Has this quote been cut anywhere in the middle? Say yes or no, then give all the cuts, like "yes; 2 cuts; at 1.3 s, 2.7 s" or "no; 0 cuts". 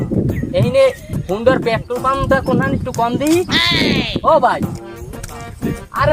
no; 0 cuts